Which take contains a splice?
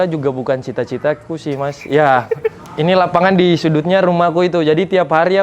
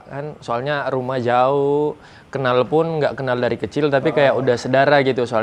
first; 1 cut; at 2.6 s

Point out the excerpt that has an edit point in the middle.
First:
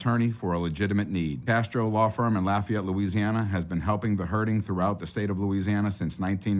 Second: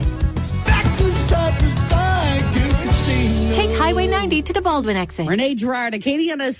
second; 1 cut; at 5.2 s

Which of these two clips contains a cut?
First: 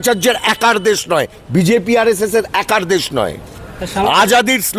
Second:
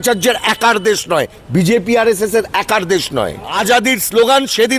second; 1 cut; at 3.5 s

